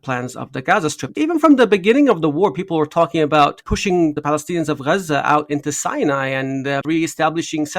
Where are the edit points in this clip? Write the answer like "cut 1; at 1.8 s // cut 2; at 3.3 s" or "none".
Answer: cut 1; at 1.0 s // cut 2; at 4.1 s // cut 3; at 6.8 s